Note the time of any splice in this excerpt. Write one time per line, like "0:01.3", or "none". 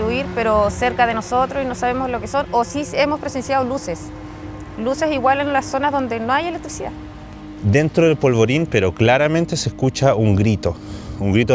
0:07.3